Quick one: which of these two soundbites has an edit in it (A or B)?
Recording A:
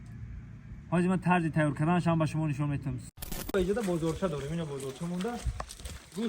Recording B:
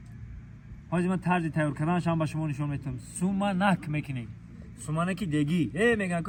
A